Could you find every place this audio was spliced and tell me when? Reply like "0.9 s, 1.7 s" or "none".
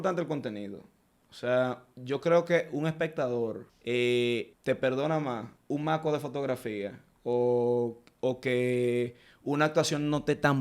3.7 s, 4.5 s, 5.5 s